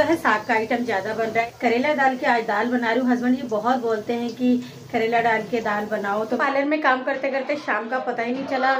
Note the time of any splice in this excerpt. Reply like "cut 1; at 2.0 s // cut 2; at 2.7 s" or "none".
cut 1; at 1.4 s // cut 2; at 6.4 s

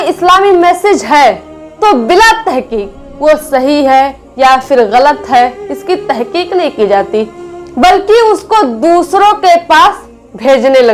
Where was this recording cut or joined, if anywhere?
none

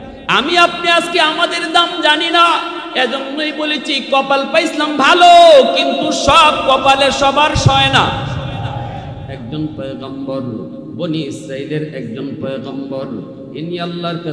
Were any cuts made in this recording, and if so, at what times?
cut 1; at 9.4 s

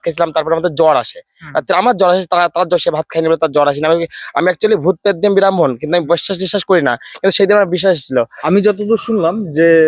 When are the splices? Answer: cut 1; at 8.4 s

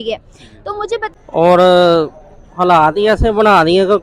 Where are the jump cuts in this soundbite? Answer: cut 1; at 1.1 s

